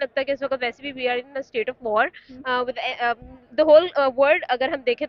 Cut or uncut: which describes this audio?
uncut